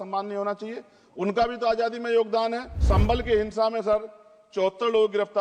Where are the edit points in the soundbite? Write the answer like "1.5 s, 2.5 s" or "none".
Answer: 2.7 s